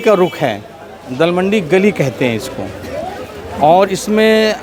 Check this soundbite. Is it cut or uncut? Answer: uncut